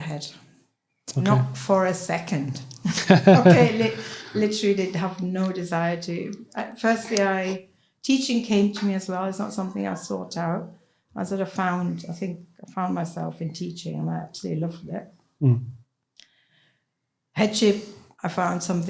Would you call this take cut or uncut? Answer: uncut